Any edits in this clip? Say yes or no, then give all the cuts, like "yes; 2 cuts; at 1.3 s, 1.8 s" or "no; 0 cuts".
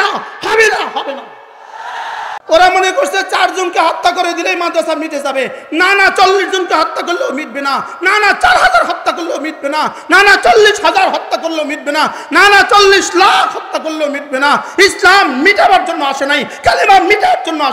yes; 1 cut; at 2.4 s